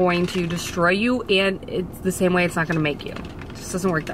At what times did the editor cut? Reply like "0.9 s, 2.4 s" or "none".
none